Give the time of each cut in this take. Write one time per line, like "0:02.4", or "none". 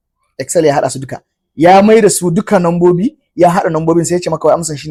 none